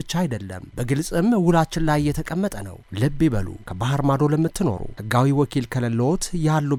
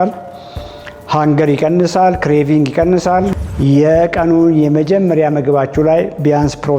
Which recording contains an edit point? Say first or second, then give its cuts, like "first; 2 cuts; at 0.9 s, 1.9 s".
second; 1 cut; at 3.4 s